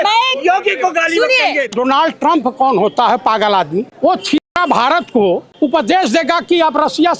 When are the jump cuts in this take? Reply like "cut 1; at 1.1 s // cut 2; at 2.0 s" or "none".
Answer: cut 1; at 1.7 s // cut 2; at 3.9 s // cut 3; at 5.5 s